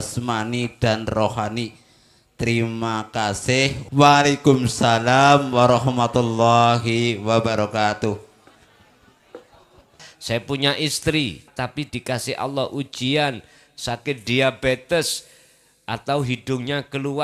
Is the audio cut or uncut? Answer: cut